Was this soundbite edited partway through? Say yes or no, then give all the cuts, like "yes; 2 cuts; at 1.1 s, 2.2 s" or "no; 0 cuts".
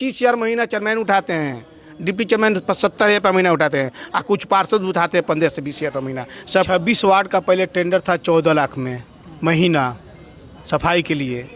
yes; 1 cut; at 6.7 s